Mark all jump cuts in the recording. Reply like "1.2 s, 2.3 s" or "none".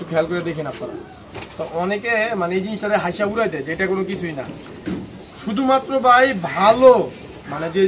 none